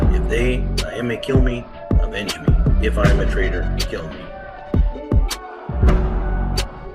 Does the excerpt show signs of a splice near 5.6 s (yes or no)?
no